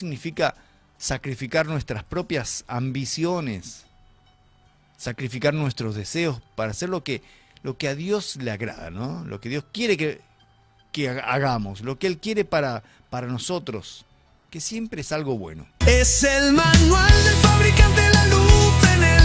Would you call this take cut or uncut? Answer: cut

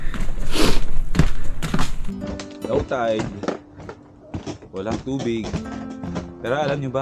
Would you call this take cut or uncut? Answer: cut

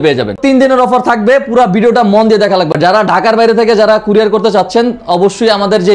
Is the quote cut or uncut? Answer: uncut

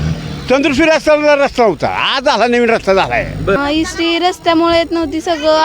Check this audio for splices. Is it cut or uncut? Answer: cut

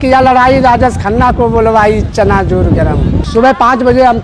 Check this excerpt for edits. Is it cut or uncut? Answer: cut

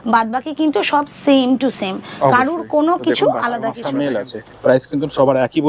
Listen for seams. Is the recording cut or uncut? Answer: cut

